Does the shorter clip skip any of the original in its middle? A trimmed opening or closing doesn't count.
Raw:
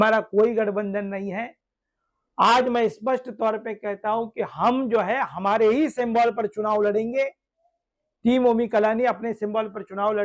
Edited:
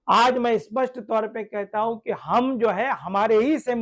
no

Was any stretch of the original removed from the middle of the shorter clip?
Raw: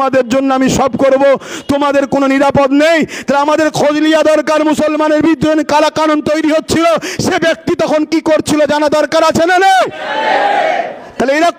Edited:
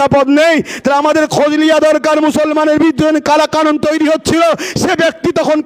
no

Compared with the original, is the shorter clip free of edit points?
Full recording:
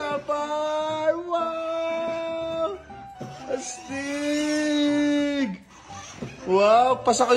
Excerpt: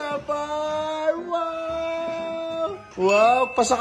no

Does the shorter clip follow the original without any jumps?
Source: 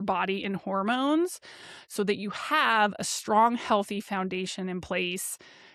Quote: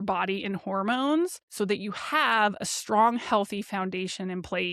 no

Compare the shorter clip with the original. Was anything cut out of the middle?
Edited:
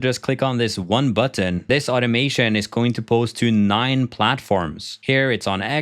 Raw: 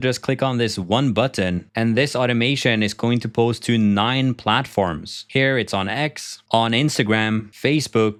yes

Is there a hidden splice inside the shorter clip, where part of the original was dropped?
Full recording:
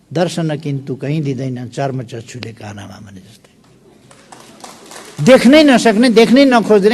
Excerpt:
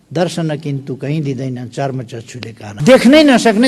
yes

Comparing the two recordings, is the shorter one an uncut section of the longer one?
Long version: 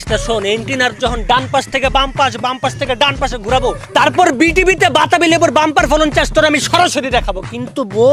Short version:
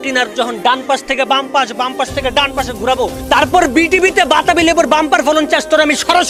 yes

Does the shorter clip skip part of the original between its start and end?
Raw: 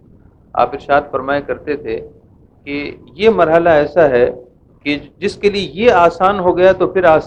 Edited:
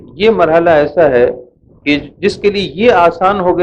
no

